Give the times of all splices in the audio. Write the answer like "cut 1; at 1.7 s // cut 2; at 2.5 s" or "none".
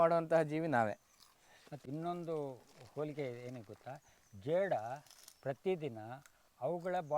cut 1; at 1.8 s